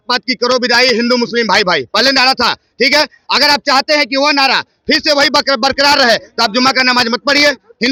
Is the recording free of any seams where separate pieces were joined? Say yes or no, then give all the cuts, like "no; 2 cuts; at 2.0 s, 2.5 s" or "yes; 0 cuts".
yes; 0 cuts